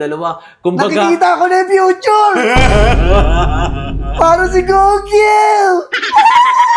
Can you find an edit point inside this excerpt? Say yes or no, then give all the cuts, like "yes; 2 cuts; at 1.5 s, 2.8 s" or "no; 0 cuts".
no; 0 cuts